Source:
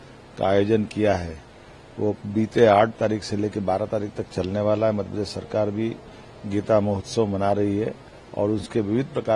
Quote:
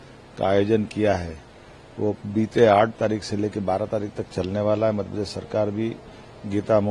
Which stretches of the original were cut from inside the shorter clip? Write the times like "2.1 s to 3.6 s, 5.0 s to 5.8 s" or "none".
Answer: none